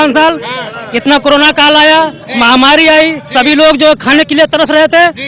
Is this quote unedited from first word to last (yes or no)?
yes